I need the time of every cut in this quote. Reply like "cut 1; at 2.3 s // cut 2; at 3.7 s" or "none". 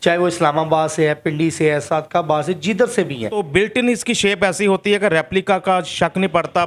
cut 1; at 3.4 s

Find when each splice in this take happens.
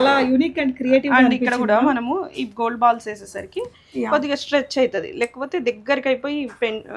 none

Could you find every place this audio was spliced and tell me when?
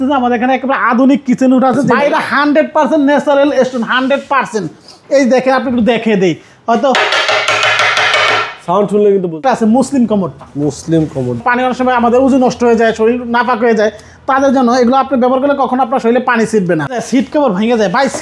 cut 1; at 1.9 s // cut 2; at 9.4 s // cut 3; at 11.4 s // cut 4; at 17.0 s

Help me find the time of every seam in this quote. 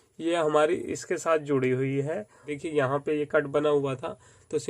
cut 1; at 2.5 s

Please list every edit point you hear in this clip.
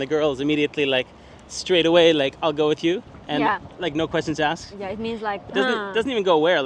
none

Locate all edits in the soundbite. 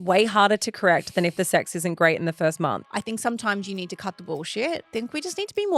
cut 1; at 2.8 s // cut 2; at 4.9 s

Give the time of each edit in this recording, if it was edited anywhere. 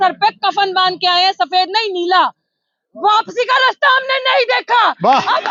none

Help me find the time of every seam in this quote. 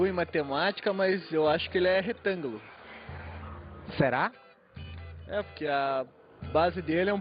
cut 1; at 5.9 s

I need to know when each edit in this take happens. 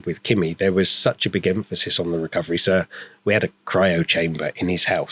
none

